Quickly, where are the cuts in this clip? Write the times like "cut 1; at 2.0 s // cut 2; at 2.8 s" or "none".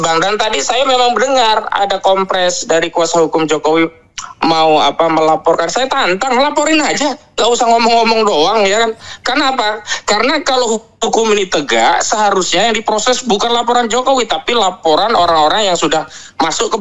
none